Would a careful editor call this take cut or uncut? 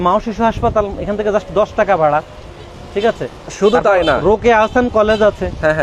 uncut